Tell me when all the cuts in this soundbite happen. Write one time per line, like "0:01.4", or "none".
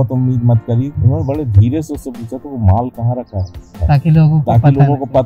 0:00.9
0:03.7

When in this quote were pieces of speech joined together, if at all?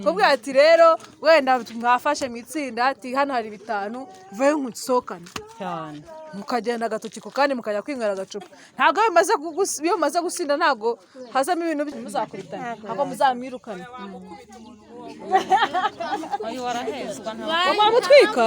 0:11.9

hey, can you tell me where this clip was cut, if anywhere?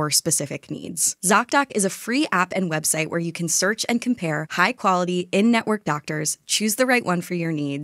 0:01.1

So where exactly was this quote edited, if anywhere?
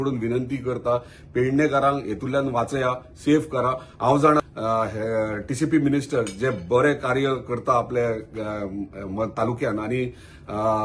0:04.4

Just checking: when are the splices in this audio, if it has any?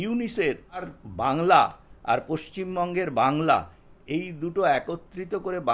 0:00.9

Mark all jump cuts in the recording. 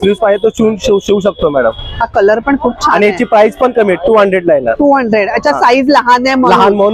none

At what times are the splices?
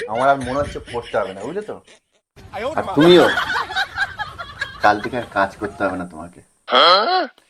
none

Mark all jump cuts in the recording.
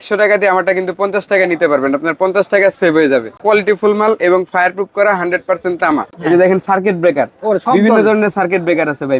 0:03.4
0:06.1

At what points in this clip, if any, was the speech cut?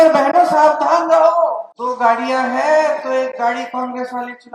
0:01.7

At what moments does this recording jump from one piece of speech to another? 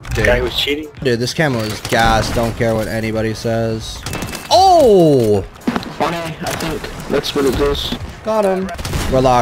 0:01.0

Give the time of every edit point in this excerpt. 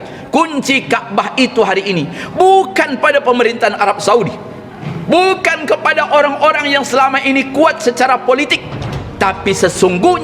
none

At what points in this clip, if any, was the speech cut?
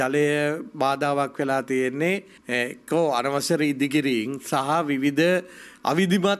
none

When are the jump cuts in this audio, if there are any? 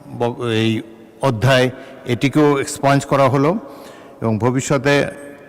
none

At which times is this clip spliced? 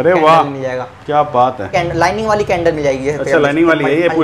0:01.7

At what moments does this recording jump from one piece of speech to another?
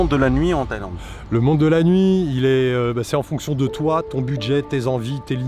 none

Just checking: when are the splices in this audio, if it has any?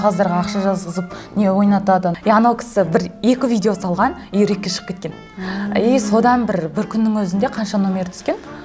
0:02.2

